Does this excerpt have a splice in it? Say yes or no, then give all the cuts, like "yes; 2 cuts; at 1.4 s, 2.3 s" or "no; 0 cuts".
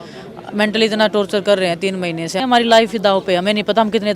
yes; 1 cut; at 2.4 s